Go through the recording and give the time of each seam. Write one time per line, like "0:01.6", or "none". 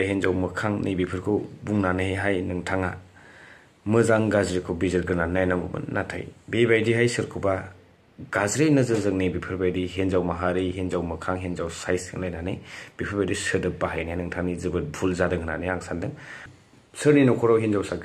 none